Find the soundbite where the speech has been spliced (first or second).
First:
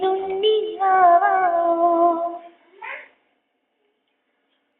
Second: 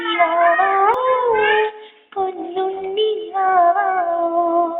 second